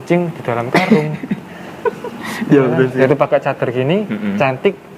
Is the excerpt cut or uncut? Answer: cut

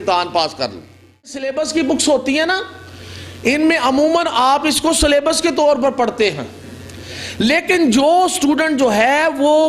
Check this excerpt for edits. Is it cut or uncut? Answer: cut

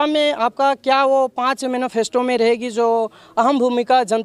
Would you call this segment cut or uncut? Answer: uncut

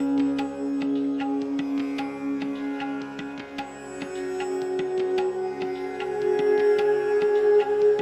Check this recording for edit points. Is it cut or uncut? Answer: uncut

